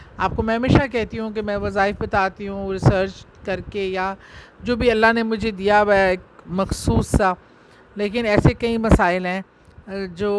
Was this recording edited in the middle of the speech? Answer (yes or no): no